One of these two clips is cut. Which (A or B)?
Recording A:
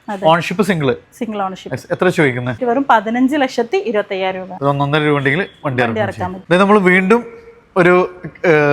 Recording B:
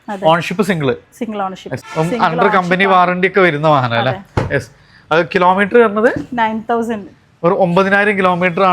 B